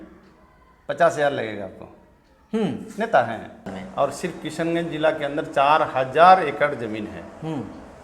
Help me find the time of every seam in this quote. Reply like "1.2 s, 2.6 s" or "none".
3.8 s